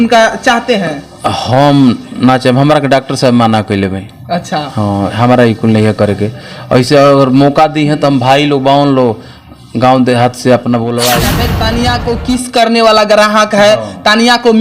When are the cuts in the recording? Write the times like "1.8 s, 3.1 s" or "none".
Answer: 11.4 s